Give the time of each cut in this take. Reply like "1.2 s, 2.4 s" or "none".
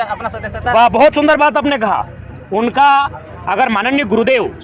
none